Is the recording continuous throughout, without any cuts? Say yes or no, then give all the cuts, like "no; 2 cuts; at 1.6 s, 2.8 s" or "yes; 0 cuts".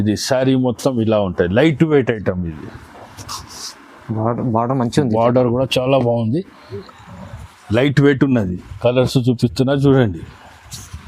no; 1 cut; at 6.8 s